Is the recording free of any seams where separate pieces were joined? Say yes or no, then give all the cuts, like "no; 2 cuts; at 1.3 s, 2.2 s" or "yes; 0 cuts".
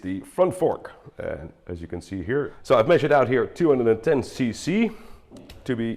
no; 1 cut; at 2.6 s